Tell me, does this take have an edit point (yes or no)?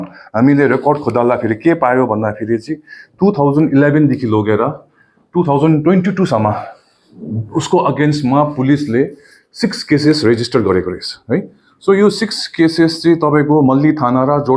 no